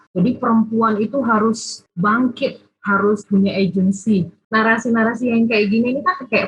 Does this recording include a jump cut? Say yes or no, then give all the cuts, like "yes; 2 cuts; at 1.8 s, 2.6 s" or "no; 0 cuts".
yes; 1 cut; at 4.4 s